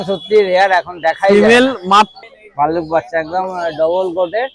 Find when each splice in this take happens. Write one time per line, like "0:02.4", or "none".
0:02.2